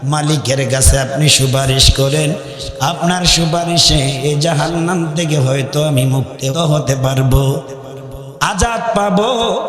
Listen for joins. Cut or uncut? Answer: cut